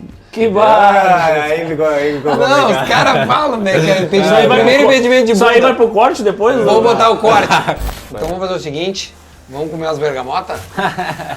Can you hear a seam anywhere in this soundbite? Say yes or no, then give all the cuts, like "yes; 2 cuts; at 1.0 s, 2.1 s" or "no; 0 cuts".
yes; 1 cut; at 7.8 s